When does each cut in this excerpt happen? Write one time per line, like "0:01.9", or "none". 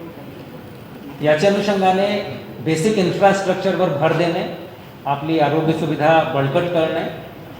0:05.2